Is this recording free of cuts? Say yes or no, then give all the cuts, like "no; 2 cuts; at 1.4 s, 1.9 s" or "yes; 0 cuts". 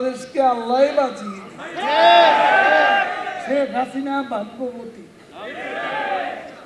yes; 0 cuts